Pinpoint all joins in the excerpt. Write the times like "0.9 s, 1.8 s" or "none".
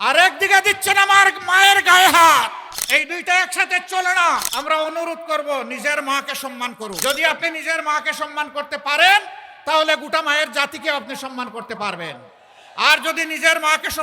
2.7 s, 4.5 s, 7.0 s